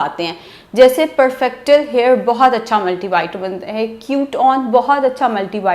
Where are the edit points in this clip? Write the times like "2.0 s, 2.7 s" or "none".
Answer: none